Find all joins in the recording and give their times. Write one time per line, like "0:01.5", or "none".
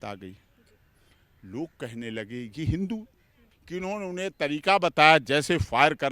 0:03.3